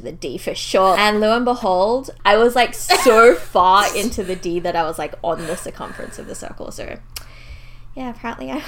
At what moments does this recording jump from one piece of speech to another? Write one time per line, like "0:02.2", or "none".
0:01.0
0:02.1